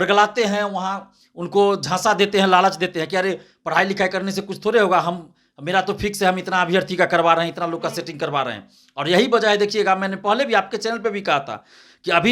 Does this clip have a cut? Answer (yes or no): no